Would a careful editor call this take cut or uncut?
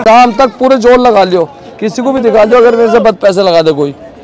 uncut